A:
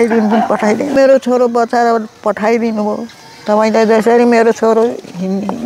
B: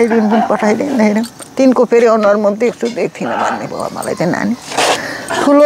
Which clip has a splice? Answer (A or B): A